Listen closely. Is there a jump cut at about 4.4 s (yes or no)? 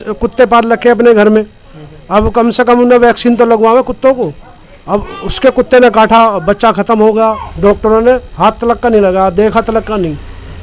no